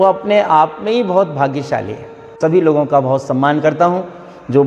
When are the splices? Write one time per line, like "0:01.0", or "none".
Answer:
0:02.3